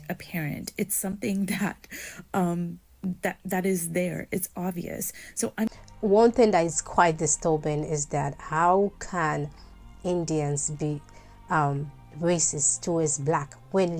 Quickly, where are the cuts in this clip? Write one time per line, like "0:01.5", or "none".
0:05.7